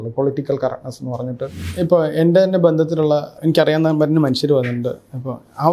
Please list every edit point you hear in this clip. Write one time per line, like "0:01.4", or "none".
0:01.6
0:03.3